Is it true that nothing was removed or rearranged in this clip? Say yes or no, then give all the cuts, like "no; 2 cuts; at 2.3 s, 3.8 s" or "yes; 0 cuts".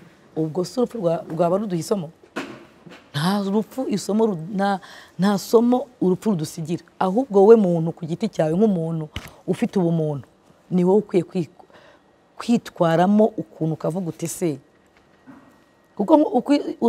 yes; 0 cuts